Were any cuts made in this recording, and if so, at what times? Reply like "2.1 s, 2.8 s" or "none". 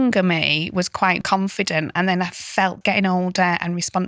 1.2 s, 2.8 s